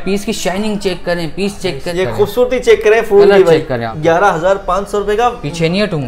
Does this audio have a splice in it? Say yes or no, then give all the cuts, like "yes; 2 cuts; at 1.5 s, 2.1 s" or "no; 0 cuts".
yes; 2 cuts; at 1.9 s, 3.9 s